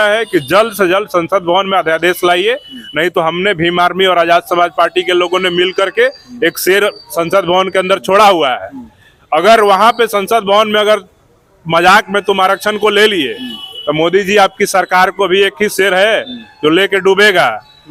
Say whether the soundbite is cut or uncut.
uncut